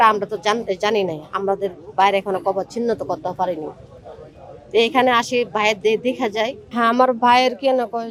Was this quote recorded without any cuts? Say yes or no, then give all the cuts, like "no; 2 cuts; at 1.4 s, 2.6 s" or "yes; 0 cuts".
yes; 0 cuts